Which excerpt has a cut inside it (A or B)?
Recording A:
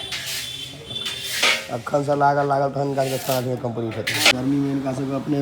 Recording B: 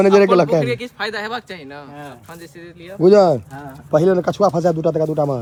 A